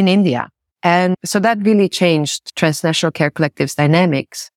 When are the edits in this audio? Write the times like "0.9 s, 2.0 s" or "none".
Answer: 1.1 s, 2.4 s